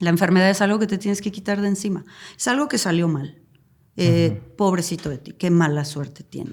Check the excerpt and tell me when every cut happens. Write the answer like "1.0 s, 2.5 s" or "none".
none